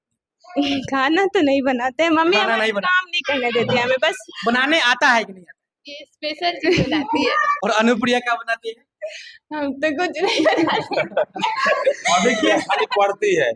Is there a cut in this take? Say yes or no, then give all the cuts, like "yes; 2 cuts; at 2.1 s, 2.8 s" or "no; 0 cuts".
yes; 1 cut; at 7.5 s